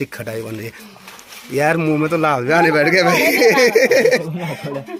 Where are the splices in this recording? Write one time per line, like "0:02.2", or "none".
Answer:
none